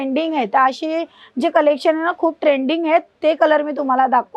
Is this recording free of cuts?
yes; 0 cuts

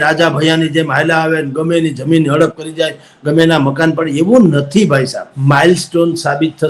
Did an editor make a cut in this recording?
yes; 1 cut; at 5.3 s

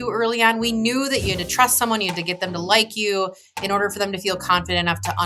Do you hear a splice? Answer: yes; 1 cut; at 1.2 s

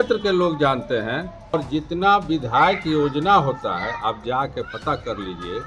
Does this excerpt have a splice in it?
yes; 1 cut; at 1.5 s

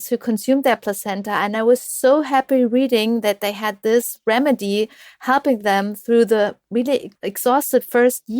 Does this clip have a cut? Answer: yes; 1 cut; at 7.2 s

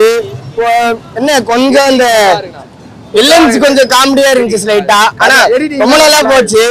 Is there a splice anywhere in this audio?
no; 0 cuts

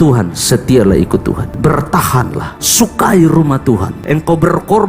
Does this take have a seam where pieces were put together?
yes; 3 cuts; at 1.5 s, 2.5 s, 4.0 s

